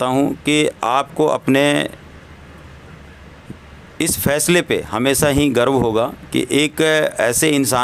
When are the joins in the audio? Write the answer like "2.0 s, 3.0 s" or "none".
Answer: none